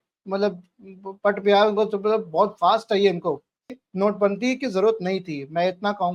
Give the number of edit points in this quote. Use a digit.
1